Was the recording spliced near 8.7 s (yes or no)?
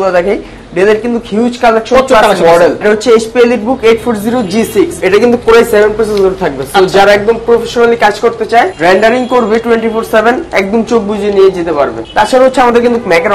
yes